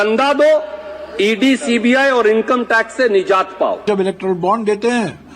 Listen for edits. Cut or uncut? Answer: cut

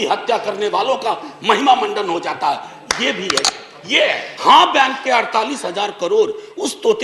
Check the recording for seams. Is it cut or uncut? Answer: cut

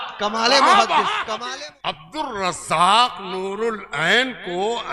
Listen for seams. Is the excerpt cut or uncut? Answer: cut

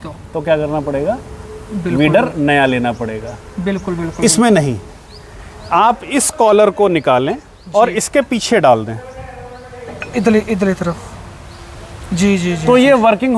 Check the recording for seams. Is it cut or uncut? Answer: uncut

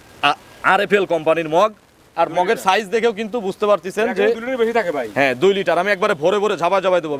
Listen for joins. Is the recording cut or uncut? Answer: uncut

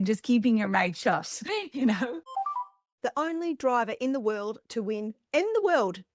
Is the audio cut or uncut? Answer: cut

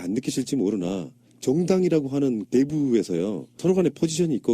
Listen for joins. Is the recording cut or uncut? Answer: uncut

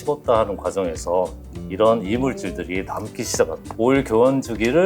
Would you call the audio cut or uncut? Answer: cut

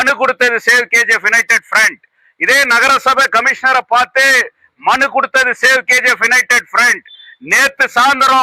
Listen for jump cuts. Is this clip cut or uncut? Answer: uncut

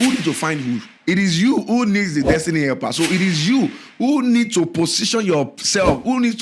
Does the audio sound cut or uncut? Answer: cut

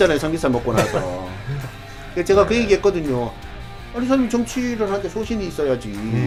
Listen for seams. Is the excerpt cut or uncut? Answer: uncut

